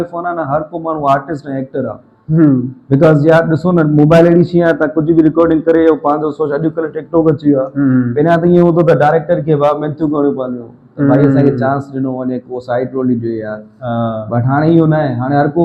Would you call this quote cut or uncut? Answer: uncut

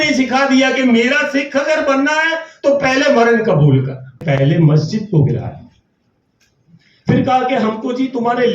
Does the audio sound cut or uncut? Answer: cut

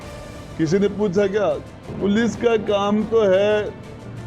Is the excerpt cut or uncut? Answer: cut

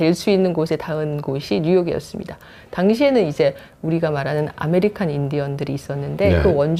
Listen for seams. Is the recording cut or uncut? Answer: uncut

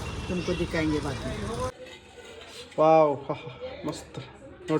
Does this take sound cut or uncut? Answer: cut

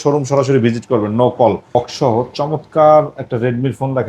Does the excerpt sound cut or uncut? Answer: cut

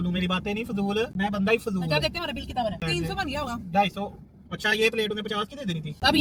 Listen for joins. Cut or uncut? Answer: uncut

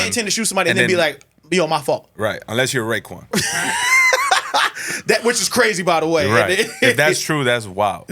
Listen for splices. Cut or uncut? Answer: cut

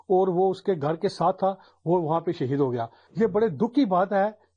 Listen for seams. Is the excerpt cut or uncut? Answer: cut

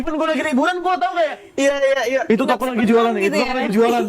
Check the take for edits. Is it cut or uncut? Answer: uncut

